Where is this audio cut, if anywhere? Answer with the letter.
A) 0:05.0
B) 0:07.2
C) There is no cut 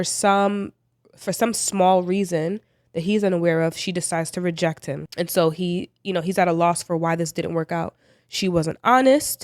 A